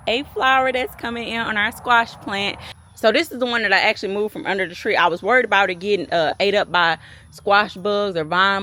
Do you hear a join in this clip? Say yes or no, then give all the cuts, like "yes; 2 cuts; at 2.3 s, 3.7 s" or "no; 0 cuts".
no; 0 cuts